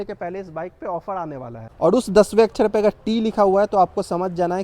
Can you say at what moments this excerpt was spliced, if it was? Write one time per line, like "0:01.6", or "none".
0:01.7